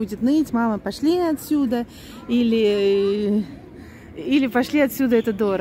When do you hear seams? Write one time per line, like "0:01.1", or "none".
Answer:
none